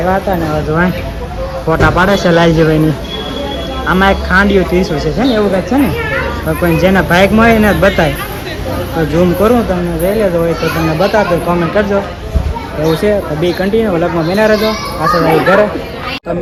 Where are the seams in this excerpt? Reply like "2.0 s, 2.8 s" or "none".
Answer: none